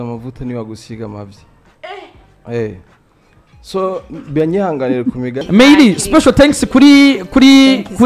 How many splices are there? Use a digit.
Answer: 1